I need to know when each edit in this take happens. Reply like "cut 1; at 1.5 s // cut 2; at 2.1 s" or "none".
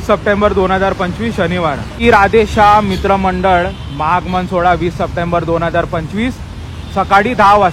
cut 1; at 2.0 s